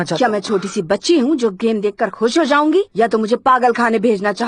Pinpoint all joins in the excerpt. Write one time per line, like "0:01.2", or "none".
none